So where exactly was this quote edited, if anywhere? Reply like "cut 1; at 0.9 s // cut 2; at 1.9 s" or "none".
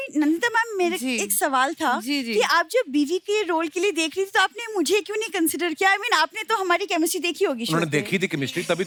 none